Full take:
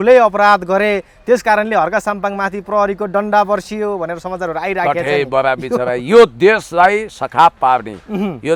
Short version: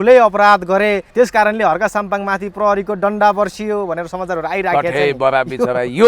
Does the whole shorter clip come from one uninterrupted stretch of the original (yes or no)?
no